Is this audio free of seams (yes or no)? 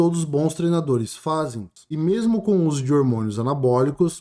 no